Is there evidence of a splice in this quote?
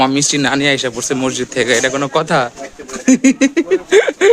no; 0 cuts

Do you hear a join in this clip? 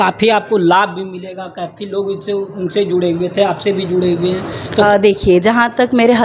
no; 0 cuts

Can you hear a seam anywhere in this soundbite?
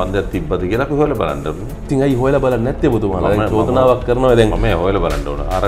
no; 0 cuts

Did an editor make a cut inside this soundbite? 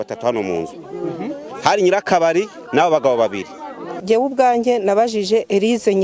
yes; 1 cut; at 4.0 s

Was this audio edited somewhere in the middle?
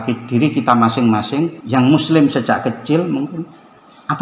yes; 1 cut; at 1.6 s

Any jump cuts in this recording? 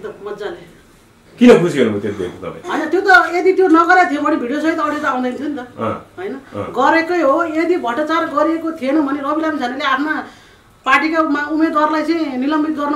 no; 0 cuts

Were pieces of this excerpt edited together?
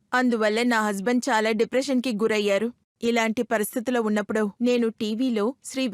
yes; 1 cut; at 2.9 s

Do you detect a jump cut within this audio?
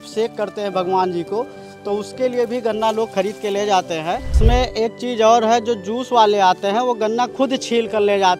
yes; 1 cut; at 4.4 s

